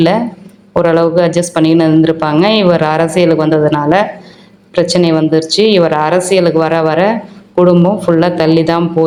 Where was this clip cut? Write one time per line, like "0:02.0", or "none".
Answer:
none